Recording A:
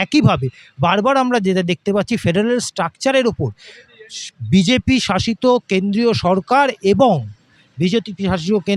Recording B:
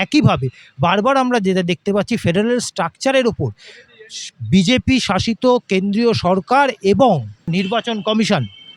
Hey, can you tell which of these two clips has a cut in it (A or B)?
B